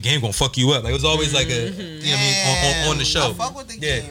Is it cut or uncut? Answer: uncut